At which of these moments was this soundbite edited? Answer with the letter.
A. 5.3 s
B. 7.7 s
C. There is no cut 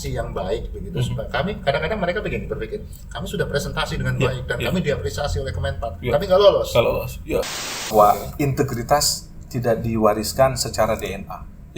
B